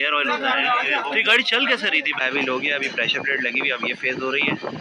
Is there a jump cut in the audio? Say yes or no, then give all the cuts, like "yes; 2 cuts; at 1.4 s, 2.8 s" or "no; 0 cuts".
yes; 1 cut; at 2.2 s